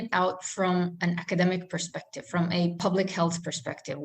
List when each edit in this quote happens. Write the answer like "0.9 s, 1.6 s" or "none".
2.8 s